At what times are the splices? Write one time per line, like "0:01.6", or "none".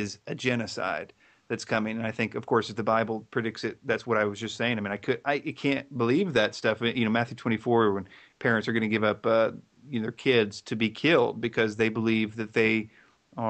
0:04.4